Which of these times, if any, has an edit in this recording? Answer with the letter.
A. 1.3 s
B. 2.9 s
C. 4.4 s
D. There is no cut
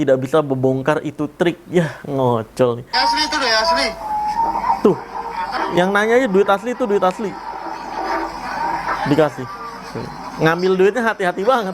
B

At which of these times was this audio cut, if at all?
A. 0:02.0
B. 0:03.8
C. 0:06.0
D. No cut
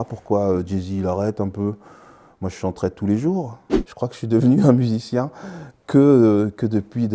B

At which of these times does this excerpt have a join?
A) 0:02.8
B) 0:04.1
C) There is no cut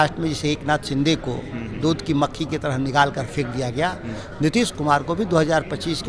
C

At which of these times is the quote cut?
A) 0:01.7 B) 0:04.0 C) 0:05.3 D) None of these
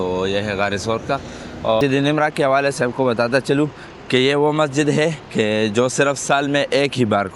A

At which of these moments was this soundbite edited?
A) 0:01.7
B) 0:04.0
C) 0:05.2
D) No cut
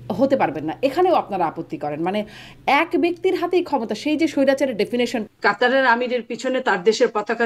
C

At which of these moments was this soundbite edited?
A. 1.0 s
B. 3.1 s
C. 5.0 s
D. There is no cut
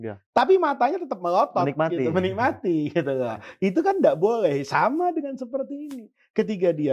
D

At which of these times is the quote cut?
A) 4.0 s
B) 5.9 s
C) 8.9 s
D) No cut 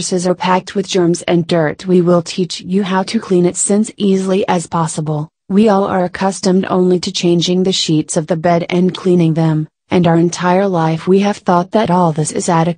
C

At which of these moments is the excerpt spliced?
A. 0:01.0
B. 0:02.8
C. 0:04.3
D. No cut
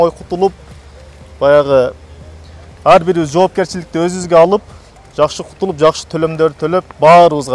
D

